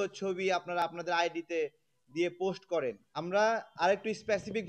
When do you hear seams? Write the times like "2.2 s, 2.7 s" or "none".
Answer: 3.1 s